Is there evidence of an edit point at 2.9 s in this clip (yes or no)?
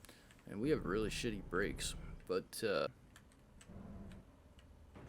yes